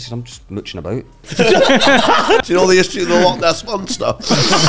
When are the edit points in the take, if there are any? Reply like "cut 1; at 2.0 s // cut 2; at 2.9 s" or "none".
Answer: cut 1; at 1.3 s // cut 2; at 2.5 s